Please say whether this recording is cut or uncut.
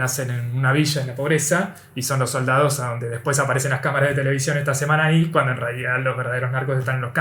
uncut